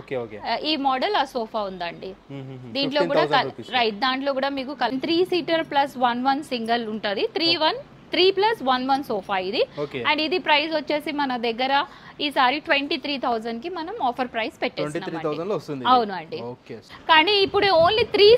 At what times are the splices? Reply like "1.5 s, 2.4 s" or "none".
4.9 s, 16.8 s

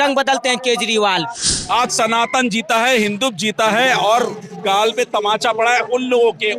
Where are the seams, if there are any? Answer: 1.5 s

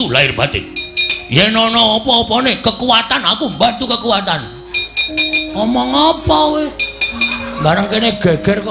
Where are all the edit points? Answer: none

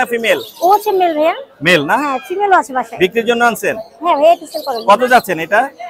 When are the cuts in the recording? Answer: none

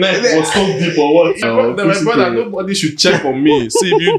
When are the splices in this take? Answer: 1.4 s

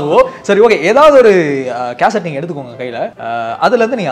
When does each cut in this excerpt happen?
3.2 s

